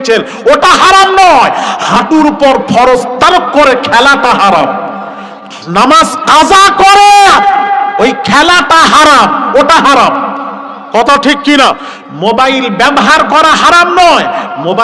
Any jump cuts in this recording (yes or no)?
no